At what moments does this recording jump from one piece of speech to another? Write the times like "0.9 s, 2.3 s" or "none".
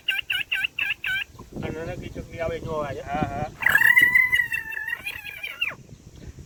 none